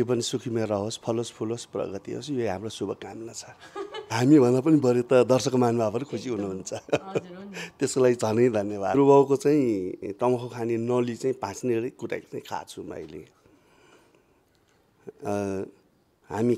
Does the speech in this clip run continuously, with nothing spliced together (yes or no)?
no